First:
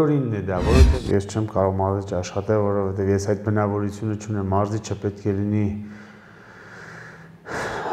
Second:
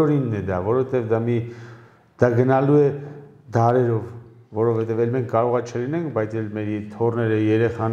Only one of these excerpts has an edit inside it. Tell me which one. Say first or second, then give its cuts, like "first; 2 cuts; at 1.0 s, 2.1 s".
first; 1 cut; at 0.9 s